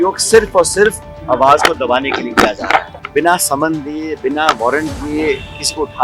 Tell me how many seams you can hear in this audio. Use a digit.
2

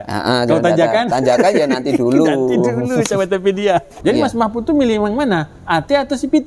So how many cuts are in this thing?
1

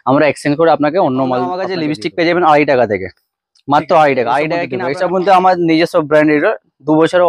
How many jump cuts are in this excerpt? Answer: 2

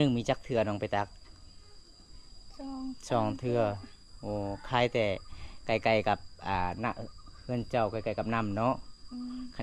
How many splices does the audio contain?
0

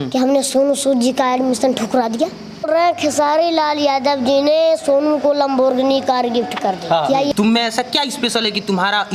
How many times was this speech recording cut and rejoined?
2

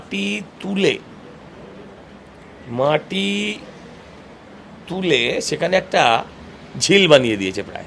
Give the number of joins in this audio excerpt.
0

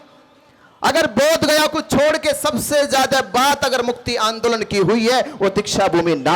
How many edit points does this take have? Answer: 0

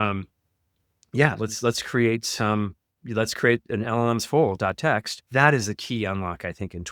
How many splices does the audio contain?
1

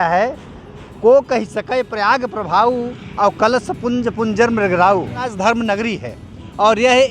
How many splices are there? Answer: 1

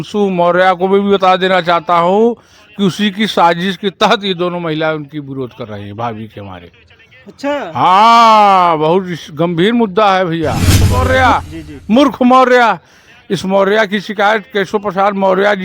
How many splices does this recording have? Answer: 1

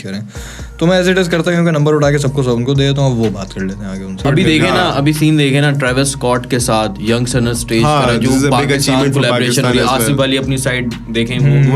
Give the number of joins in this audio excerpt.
1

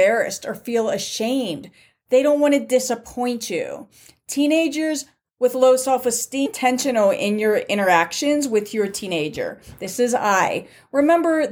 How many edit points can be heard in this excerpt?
1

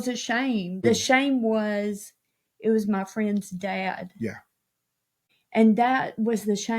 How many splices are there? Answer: 2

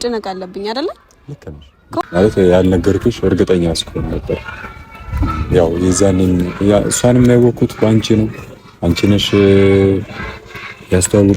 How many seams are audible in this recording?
1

